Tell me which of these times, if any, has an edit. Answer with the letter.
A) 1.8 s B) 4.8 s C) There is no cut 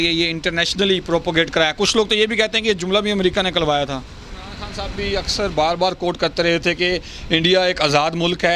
B